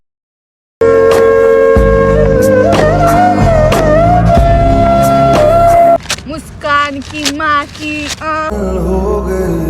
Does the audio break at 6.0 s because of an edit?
yes; 1 cut; at 6.0 s

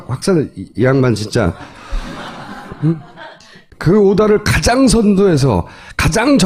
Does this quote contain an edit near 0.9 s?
no; 0 cuts

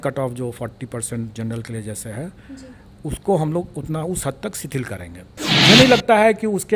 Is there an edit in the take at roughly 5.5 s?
yes; 1 cut; at 5.5 s

